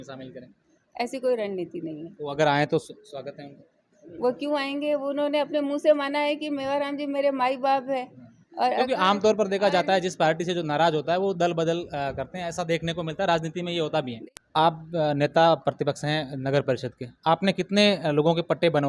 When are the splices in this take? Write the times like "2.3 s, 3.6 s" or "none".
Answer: 14.3 s